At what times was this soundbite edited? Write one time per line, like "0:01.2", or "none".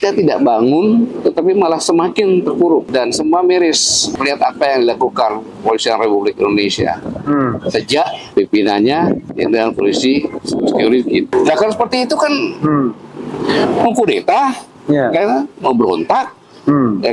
0:02.9
0:04.1
0:08.2
0:09.3
0:11.3